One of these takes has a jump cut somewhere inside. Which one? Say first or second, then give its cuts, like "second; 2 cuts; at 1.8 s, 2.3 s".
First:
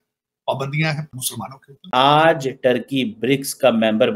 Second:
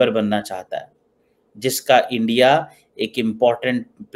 first; 1 cut; at 1.9 s